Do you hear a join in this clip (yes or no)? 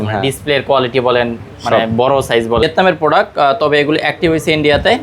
yes